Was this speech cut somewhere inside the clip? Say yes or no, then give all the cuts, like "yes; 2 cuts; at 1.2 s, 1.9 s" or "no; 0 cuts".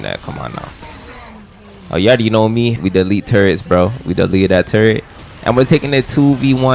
yes; 1 cut; at 2.8 s